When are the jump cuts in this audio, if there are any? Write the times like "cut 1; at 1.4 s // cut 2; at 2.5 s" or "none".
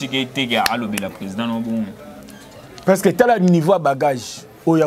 none